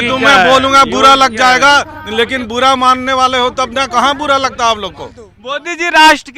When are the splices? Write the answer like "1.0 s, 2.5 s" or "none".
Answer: 5.3 s